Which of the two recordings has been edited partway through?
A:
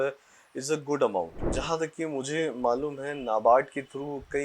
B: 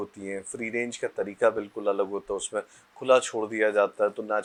A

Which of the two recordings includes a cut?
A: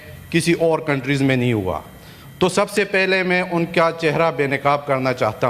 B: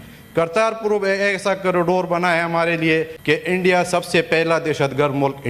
B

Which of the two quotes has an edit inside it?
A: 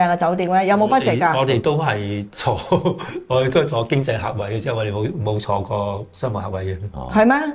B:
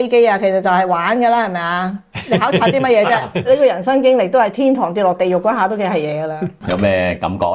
B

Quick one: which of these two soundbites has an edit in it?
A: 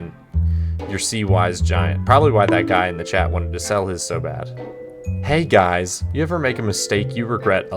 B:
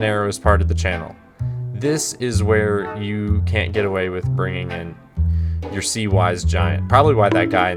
A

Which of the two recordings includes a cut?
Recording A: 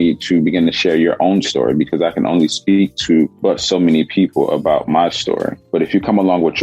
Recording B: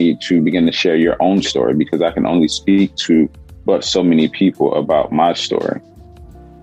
A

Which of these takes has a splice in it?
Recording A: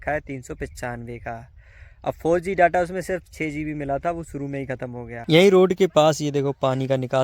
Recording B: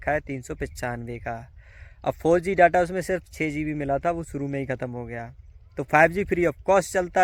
A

